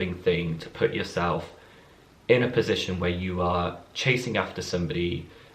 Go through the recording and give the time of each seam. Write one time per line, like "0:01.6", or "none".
none